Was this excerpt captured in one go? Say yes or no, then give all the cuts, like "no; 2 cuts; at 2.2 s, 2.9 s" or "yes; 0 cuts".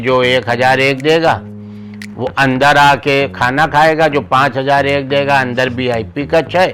yes; 0 cuts